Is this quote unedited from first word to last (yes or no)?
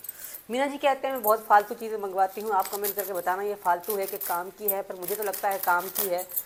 yes